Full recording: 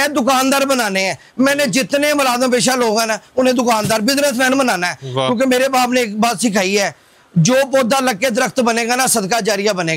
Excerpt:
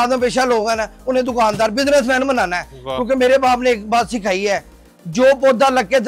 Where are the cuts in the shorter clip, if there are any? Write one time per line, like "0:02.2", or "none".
none